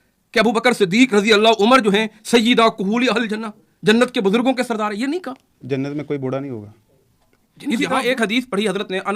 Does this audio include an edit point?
yes; 1 cut; at 7.8 s

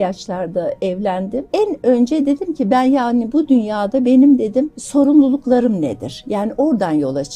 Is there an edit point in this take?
yes; 2 cuts; at 1.5 s, 4.8 s

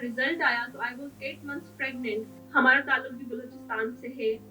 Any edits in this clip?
yes; 1 cut; at 2.4 s

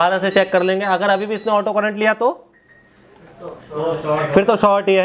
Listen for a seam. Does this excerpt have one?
no; 0 cuts

